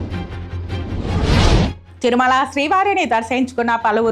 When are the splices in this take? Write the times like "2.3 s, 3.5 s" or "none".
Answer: none